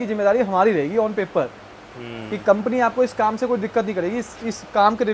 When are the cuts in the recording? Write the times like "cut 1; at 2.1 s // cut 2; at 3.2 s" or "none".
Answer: none